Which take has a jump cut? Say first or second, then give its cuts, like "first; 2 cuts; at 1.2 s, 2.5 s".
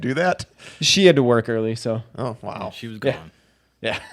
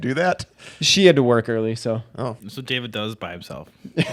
second; 1 cut; at 2.4 s